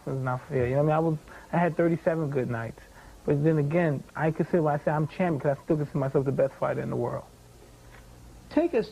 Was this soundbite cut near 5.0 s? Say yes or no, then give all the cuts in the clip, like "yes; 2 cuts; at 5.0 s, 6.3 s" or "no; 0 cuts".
yes; 1 cut; at 5.0 s